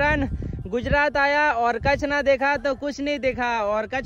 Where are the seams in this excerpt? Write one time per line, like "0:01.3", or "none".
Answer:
none